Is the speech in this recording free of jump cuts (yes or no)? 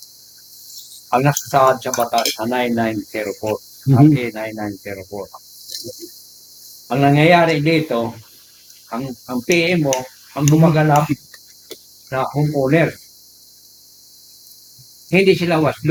yes